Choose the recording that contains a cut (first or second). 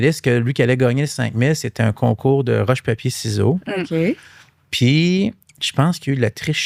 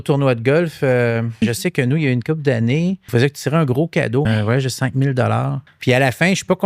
second